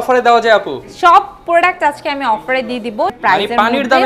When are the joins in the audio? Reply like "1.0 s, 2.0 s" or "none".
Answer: 3.2 s